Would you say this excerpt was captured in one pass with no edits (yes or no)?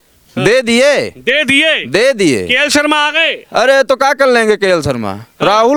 yes